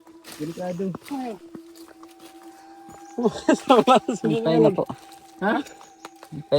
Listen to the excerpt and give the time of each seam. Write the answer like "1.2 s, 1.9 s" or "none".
1.4 s, 3.2 s